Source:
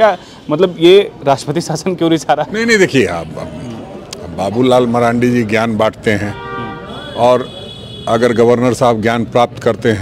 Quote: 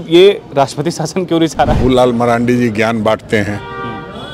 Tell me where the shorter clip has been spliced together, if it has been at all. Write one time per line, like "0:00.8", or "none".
0:01.8